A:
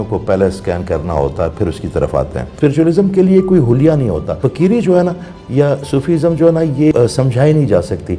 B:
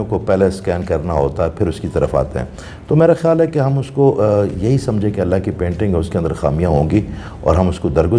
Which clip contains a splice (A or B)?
A